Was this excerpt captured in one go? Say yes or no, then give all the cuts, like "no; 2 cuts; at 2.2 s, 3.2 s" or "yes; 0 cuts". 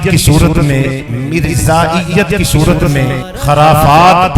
no; 1 cut; at 3.3 s